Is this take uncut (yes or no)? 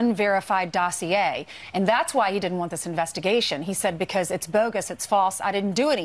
yes